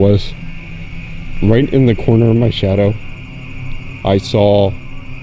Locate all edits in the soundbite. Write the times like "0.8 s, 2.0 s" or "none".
1.3 s